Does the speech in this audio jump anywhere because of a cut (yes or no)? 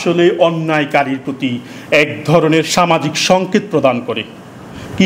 no